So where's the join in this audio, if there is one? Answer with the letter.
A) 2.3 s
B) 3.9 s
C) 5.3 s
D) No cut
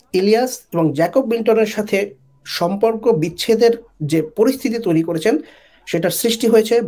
D